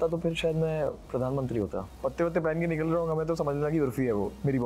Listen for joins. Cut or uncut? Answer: cut